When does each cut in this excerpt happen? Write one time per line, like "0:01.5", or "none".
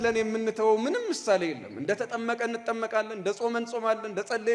none